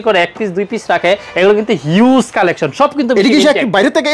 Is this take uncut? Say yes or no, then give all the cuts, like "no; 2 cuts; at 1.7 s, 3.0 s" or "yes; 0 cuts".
yes; 0 cuts